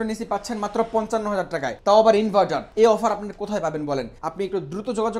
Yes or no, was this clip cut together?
yes